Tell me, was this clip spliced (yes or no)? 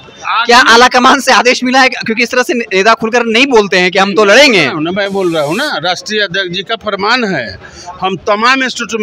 no